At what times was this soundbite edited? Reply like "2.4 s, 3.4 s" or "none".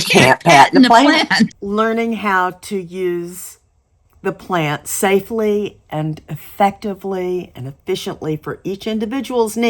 1.5 s

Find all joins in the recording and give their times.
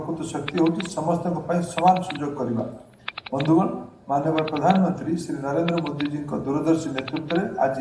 none

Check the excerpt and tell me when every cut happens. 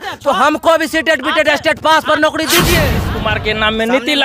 3.0 s

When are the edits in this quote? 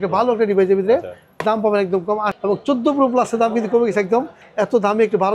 2.3 s, 4.4 s

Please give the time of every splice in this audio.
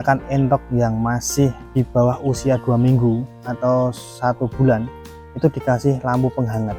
1.6 s

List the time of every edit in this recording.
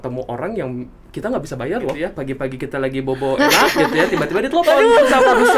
2.1 s

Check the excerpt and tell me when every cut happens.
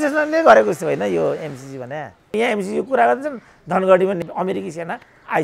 2.3 s, 4.2 s

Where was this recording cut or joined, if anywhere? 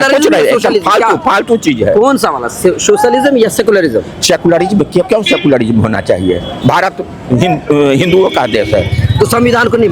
none

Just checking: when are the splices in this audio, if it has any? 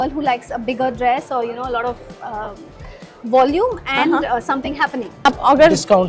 5.1 s

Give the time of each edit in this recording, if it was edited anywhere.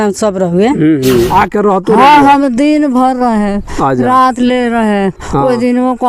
1.3 s

